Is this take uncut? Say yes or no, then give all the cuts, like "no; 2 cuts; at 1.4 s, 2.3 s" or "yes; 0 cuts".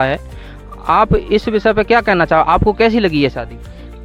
yes; 0 cuts